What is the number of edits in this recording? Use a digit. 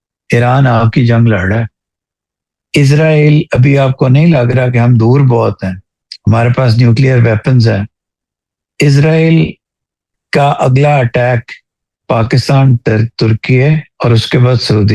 0